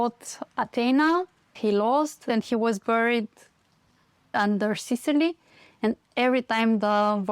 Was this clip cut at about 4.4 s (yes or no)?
yes